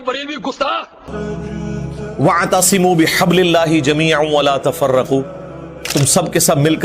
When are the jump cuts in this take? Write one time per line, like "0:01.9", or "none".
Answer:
0:01.1